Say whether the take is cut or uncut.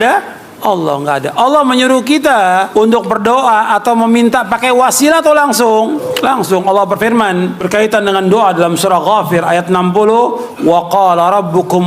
cut